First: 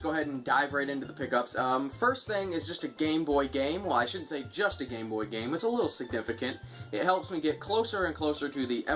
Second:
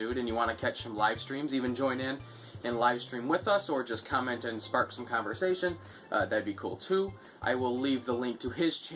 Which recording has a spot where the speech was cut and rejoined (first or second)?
second